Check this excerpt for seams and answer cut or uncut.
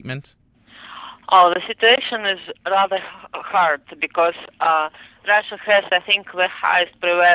uncut